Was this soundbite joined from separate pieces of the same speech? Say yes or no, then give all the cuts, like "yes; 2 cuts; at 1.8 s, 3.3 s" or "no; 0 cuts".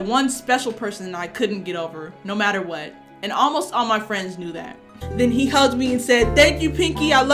yes; 1 cut; at 5.0 s